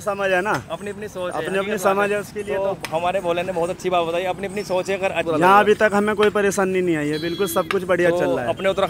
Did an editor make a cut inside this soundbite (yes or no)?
yes